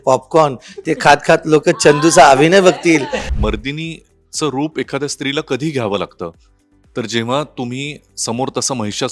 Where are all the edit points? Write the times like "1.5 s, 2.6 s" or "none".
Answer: 3.2 s